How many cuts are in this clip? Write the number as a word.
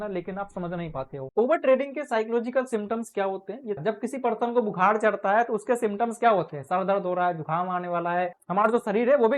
three